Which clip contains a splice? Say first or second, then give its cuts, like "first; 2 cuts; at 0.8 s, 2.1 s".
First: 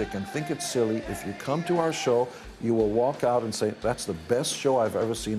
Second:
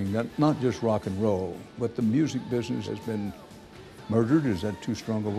second; 2 cuts; at 1.6 s, 2.8 s